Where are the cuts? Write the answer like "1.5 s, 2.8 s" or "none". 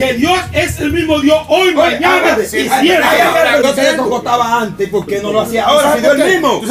3.6 s